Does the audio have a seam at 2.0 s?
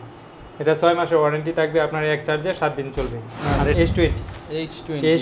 no; 1 cut; at 3.8 s

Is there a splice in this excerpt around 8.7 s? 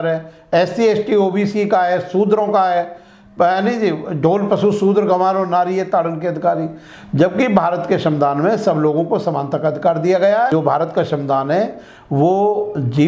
no; 1 cut; at 10.5 s

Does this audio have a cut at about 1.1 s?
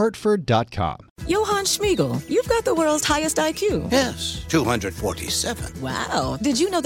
yes; 1 cut; at 1.1 s

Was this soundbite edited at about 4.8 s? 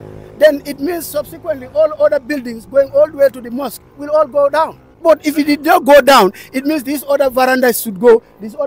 yes; 1 cut; at 4.8 s

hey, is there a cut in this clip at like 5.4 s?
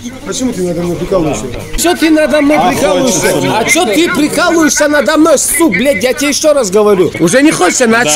no; 2 cuts; at 1.7 s, 7.1 s

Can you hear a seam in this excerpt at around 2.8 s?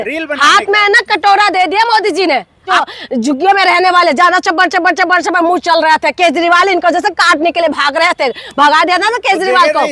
yes; 1 cut; at 2.8 s

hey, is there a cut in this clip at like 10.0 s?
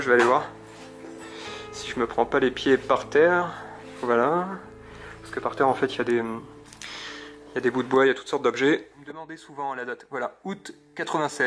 yes; 1 cut; at 10.0 s

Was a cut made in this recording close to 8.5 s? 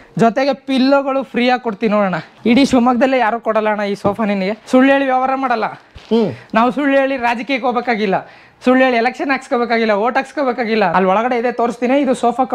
no; 3 cuts; at 2.3 s, 4.6 s, 10.9 s

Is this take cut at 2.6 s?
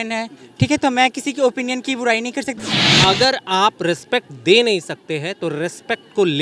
yes; 1 cut; at 2.6 s

